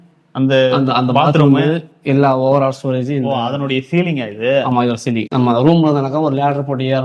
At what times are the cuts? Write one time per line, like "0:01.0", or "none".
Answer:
0:05.3

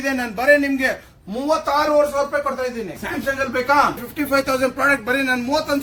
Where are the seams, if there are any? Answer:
0:03.0
0:04.1

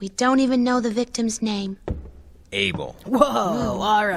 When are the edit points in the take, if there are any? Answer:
none

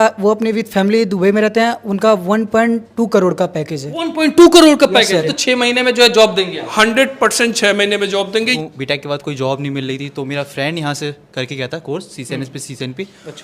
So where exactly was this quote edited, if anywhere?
0:05.3
0:08.5

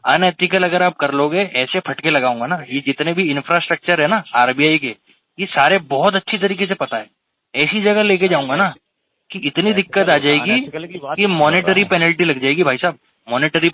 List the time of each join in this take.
none

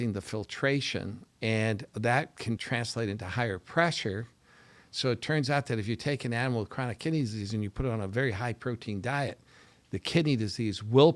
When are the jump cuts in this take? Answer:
0:01.2
0:02.6

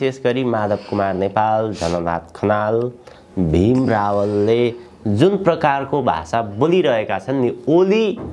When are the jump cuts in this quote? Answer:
none

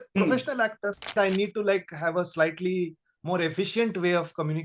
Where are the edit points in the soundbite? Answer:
0:01.1

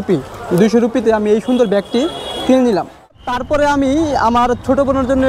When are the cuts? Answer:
0:03.2

